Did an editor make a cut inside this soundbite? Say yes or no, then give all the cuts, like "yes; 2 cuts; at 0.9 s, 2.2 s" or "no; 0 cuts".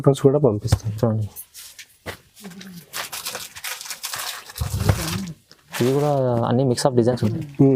no; 0 cuts